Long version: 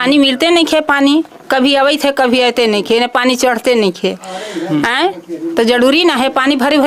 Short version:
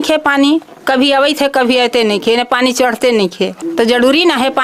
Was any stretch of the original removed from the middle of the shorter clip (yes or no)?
yes